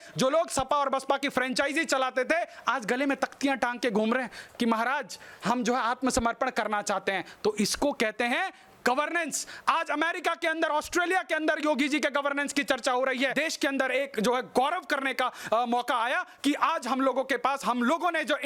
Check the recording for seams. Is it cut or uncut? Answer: cut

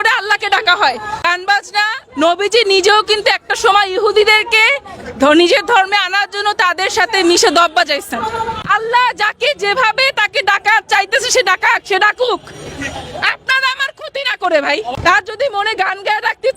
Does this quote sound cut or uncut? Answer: cut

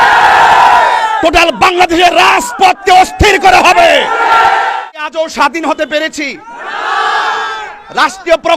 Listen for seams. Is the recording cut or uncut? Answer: cut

